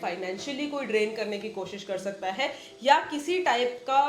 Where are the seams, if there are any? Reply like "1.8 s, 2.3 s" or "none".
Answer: none